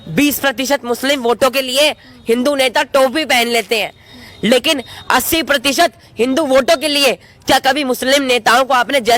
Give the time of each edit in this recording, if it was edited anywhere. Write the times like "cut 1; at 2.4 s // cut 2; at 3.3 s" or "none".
none